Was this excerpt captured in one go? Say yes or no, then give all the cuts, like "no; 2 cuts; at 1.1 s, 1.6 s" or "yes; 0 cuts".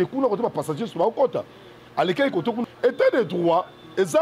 no; 1 cut; at 2.6 s